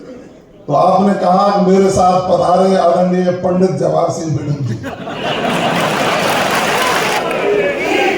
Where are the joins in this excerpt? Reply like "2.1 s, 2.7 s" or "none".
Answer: 7.2 s